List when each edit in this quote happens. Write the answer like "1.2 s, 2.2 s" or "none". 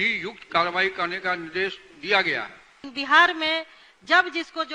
2.8 s